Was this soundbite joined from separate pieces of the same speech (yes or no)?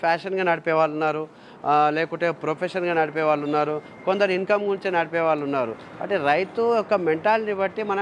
no